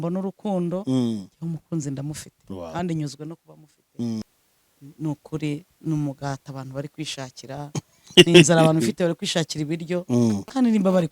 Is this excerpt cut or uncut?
cut